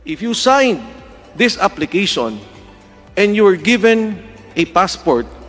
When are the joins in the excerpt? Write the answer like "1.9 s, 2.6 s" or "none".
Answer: none